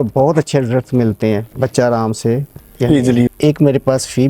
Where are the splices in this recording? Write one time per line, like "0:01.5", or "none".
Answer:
0:03.3